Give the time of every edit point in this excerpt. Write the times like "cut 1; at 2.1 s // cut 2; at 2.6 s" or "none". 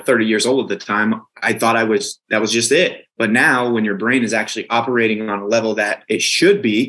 cut 1; at 1.3 s // cut 2; at 2.2 s // cut 3; at 3.0 s